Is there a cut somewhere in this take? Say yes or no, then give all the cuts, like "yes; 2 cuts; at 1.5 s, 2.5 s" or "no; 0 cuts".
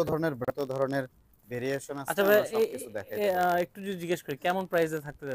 no; 0 cuts